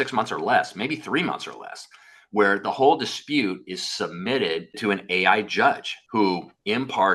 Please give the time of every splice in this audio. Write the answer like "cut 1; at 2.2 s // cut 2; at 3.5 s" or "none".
cut 1; at 4.8 s